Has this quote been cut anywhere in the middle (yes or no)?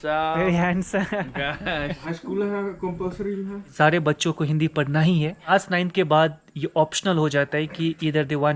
yes